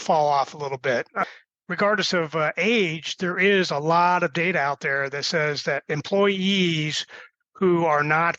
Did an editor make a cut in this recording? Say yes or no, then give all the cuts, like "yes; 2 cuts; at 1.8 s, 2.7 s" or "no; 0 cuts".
yes; 1 cut; at 1.1 s